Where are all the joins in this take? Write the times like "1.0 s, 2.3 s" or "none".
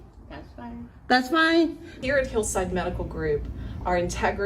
2.0 s